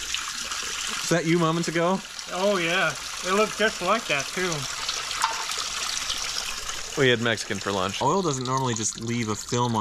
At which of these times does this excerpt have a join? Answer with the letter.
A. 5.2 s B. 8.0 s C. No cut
B